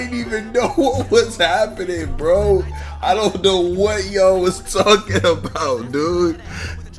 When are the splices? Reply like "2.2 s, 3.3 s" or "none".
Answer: none